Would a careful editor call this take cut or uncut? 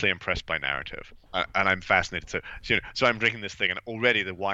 cut